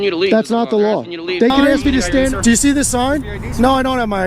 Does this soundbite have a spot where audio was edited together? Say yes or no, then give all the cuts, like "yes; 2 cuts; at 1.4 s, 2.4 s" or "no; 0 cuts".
yes; 1 cut; at 2.3 s